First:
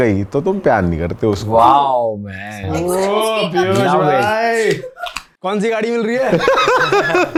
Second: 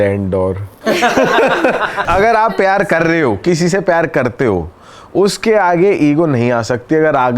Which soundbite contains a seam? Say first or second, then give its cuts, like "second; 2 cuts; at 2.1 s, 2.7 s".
second; 1 cut; at 2.0 s